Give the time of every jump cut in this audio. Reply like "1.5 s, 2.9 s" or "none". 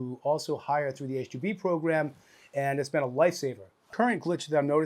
3.9 s